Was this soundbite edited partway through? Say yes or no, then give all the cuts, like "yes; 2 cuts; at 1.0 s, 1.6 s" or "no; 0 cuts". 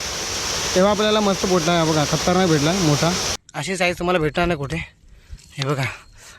yes; 1 cut; at 3.4 s